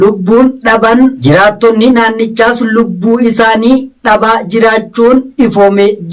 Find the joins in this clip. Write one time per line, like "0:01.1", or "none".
0:01.2